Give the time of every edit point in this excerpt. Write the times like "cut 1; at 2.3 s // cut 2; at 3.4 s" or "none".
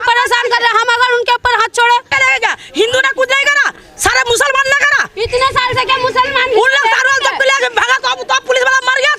cut 1; at 2.2 s